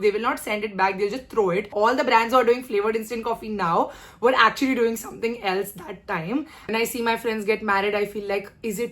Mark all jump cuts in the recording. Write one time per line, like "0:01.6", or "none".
0:01.7
0:06.7

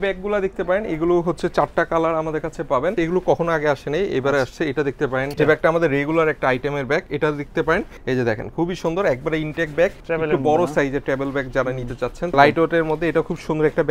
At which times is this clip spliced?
0:02.9
0:05.4
0:07.9
0:10.0
0:12.3

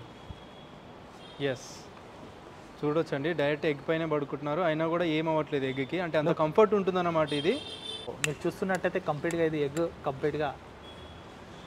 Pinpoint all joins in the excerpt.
0:08.2

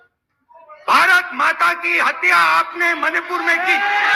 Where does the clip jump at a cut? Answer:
none

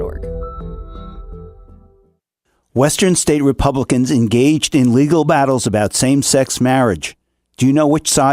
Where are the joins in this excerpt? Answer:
0:02.6

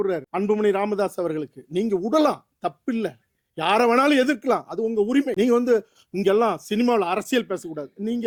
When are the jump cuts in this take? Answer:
none

